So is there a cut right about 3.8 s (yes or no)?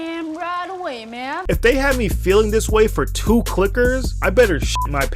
no